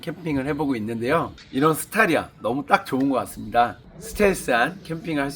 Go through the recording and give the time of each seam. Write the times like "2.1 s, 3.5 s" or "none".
1.4 s, 3.9 s